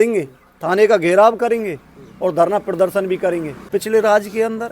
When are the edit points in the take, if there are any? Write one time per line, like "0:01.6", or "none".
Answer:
0:03.6